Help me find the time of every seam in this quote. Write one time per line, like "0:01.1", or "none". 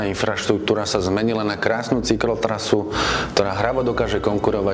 none